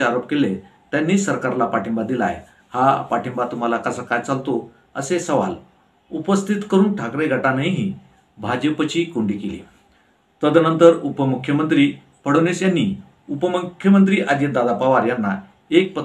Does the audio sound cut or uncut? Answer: uncut